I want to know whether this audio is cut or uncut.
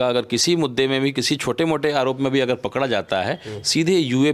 uncut